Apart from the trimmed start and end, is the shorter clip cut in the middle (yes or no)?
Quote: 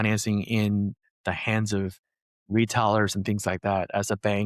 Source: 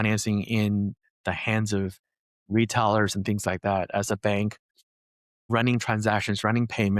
no